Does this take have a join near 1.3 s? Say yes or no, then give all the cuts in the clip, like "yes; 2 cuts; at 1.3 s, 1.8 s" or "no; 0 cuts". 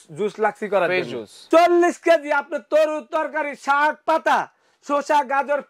yes; 1 cut; at 1.3 s